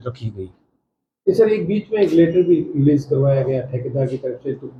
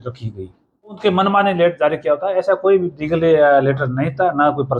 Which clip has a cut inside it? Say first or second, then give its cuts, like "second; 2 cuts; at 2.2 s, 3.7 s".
second; 1 cut; at 1.0 s